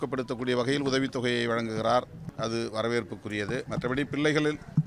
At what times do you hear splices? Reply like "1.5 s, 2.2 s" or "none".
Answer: 2.2 s, 3.7 s